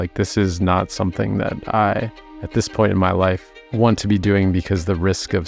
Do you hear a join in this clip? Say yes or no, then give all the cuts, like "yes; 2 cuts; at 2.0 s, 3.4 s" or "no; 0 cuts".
no; 0 cuts